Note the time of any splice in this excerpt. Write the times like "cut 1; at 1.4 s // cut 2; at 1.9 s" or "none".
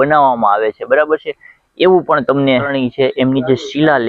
cut 1; at 2.7 s